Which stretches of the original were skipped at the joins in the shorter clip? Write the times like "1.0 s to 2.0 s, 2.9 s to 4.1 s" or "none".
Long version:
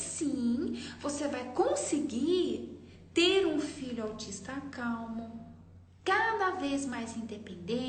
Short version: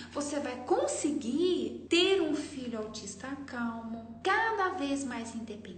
2.6 s to 3.0 s, 5.4 s to 5.9 s